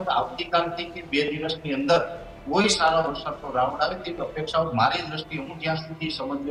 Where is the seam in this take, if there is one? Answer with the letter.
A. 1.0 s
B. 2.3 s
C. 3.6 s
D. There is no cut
D